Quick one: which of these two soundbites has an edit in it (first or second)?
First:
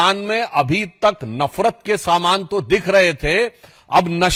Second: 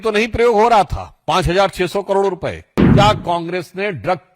second